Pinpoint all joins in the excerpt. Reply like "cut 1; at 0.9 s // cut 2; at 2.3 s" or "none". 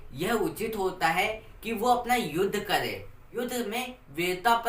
cut 1; at 3.2 s